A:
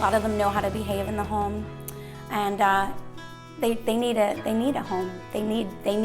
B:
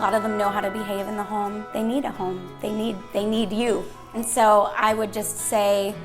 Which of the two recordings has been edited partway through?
B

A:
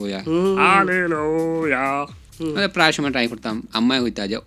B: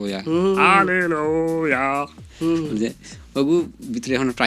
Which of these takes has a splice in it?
A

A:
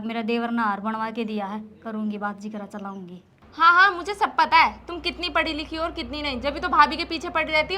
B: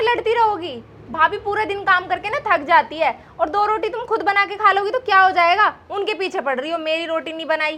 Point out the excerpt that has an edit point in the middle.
A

